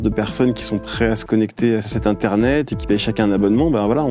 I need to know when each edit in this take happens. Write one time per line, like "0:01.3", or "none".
0:01.9

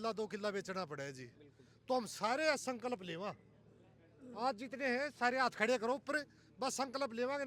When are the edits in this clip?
none

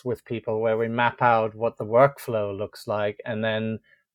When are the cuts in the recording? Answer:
none

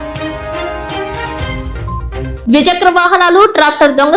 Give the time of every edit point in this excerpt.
0:02.3

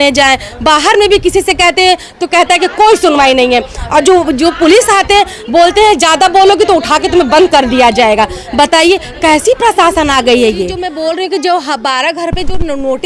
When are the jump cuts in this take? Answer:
0:10.8

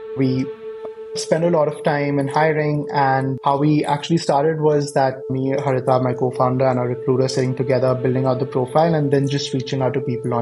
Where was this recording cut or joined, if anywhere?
0:05.3

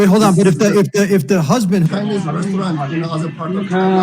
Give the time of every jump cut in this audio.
0:01.9

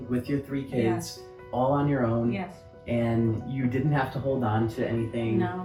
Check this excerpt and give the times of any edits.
none

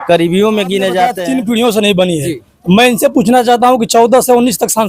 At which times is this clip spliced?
0:01.2

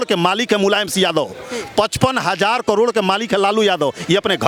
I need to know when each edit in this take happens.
none

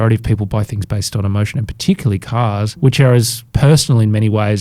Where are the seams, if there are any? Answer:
0:02.7
0:03.4

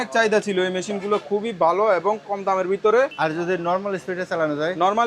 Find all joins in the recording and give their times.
0:03.1

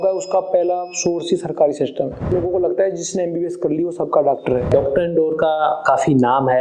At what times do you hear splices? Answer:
0:02.3
0:04.6

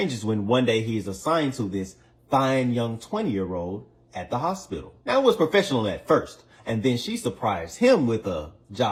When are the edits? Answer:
none

